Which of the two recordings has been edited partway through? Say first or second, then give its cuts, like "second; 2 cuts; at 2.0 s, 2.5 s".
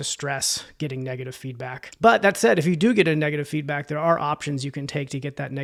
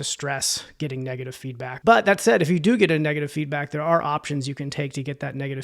second; 1 cut; at 1.7 s